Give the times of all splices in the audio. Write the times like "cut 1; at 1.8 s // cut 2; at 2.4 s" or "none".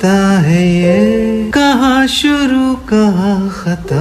cut 1; at 1.5 s